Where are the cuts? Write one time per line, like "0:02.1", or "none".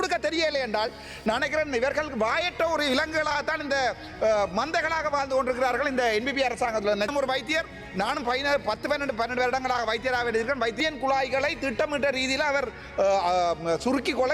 0:07.1
0:10.8